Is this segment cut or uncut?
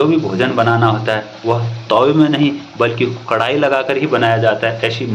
uncut